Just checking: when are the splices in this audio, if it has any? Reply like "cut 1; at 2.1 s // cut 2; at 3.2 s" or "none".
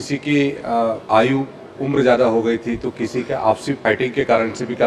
cut 1; at 1.0 s // cut 2; at 3.8 s